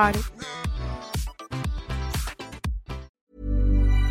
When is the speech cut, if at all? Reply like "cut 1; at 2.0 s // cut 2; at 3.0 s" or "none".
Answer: cut 1; at 3.1 s